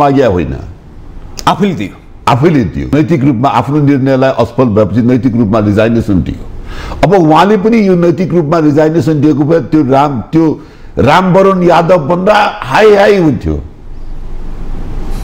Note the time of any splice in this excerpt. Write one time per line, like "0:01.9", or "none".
0:02.9